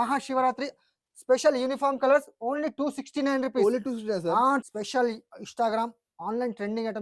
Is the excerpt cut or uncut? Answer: cut